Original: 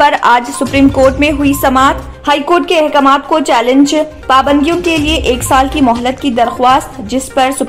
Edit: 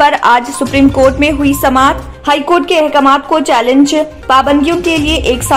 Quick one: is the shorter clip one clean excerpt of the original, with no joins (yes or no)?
yes